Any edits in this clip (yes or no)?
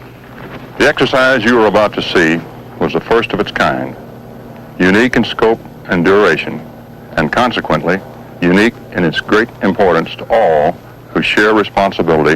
yes